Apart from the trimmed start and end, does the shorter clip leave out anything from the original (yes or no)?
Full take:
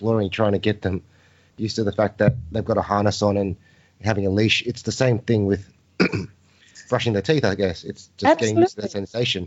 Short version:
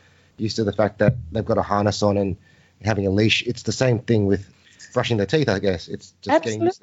yes